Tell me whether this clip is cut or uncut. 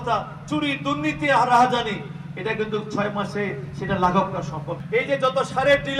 cut